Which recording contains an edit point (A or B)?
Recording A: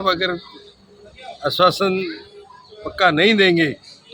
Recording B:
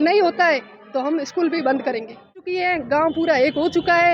B